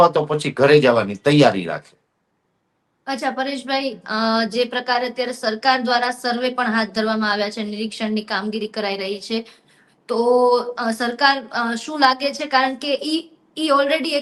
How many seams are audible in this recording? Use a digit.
0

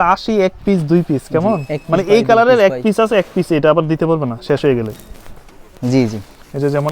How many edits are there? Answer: 0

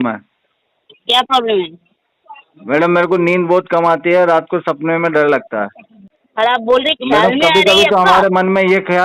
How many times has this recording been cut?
1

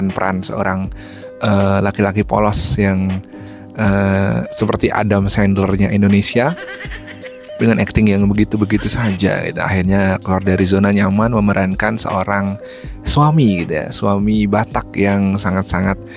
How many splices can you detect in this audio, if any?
0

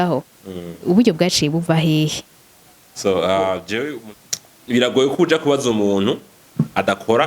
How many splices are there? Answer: 1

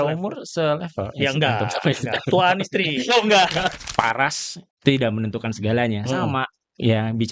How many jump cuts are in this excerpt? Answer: 1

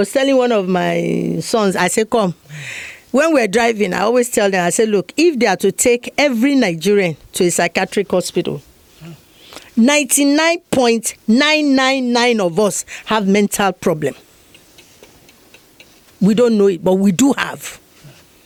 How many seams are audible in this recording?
0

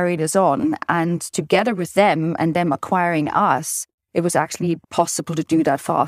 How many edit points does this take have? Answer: 1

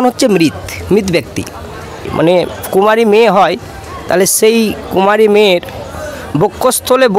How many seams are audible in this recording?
1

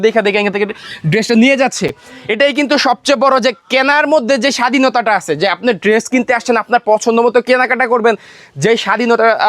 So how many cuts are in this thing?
0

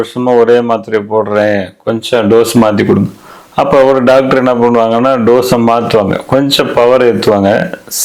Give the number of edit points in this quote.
0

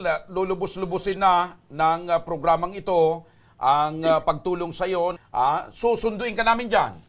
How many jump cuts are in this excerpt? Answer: 1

